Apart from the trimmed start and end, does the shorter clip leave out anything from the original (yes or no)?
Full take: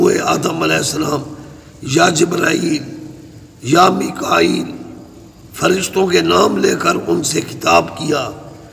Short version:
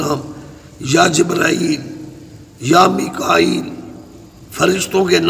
no